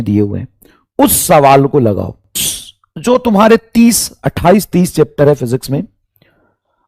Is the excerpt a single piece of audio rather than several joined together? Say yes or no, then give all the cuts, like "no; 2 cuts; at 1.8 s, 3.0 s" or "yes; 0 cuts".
no; 1 cut; at 2.5 s